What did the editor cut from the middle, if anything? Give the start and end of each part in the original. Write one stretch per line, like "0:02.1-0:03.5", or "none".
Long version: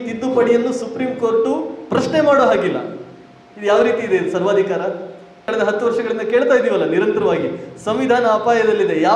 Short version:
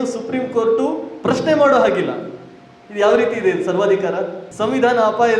0:05.1-0:07.7